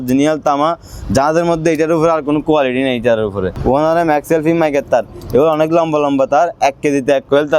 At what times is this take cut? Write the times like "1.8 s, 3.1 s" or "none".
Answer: 3.5 s